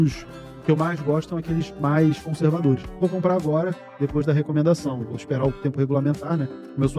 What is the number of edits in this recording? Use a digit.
1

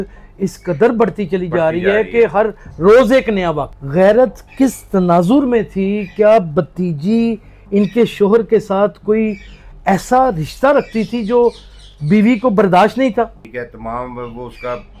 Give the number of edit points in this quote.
2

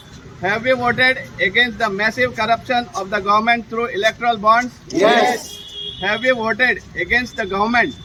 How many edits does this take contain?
0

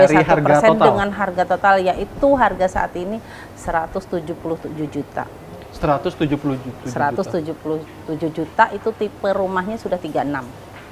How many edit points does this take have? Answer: 0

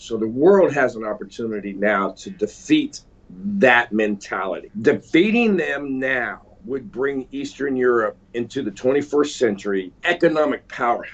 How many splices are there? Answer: 4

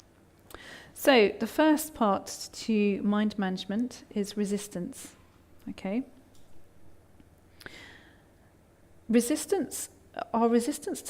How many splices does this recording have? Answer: 1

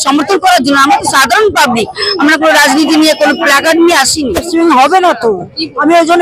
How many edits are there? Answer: 1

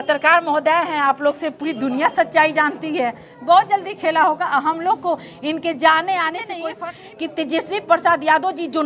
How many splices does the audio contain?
1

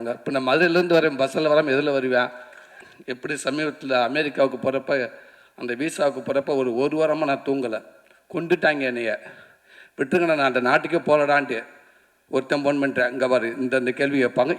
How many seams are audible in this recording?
1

